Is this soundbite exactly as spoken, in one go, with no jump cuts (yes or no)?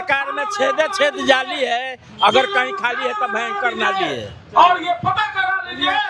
yes